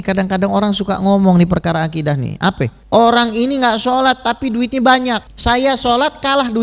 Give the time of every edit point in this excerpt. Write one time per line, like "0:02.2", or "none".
0:02.8
0:05.3